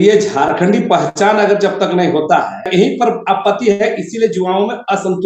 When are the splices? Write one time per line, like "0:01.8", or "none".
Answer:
0:02.7